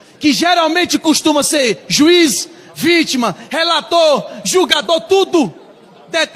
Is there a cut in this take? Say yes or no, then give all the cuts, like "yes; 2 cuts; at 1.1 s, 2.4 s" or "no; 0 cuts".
no; 0 cuts